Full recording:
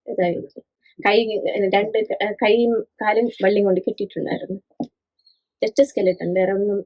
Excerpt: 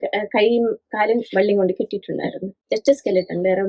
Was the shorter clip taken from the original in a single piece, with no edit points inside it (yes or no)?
no